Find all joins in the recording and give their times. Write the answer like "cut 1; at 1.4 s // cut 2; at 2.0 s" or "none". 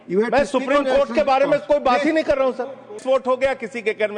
cut 1; at 2.9 s